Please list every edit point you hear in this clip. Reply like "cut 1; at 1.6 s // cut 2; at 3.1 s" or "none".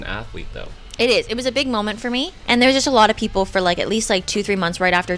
cut 1; at 2.3 s